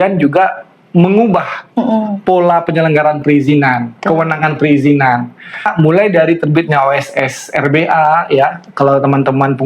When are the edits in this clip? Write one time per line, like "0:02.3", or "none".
0:05.7